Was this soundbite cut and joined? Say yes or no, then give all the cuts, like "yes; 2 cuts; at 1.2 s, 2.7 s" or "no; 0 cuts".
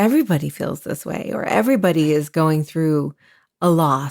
no; 0 cuts